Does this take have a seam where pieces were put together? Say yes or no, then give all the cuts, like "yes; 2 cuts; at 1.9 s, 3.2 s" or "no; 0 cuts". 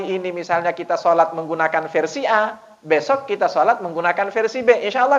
no; 0 cuts